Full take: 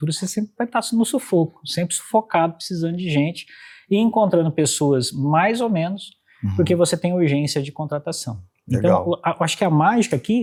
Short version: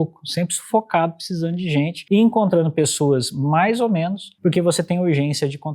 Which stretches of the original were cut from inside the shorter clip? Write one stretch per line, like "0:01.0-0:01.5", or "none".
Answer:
0:03.4-0:03.8
0:06.1-0:06.4